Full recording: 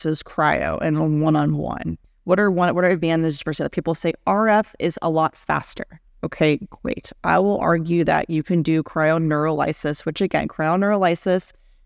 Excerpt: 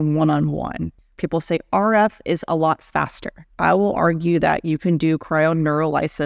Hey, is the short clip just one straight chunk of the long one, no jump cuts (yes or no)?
no